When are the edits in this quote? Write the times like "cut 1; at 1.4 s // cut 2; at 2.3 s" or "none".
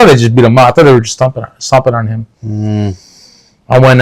none